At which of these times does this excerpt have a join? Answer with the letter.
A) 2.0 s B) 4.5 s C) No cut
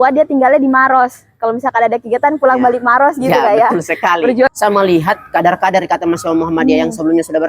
B